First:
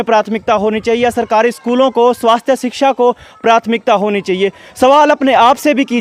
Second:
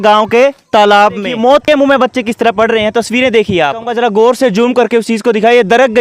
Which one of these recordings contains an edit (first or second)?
second